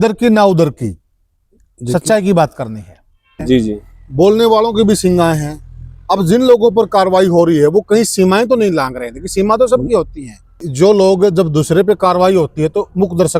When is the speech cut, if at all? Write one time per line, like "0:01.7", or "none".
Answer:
0:03.4
0:10.7